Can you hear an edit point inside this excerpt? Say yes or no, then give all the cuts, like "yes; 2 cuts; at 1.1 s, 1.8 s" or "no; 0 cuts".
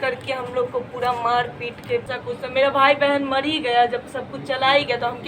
yes; 1 cut; at 2.1 s